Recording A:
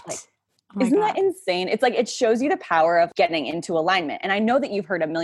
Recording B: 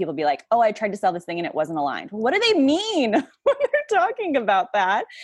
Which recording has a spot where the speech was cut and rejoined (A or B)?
A